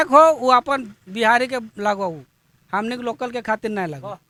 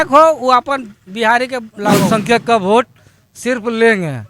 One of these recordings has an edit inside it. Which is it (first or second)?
second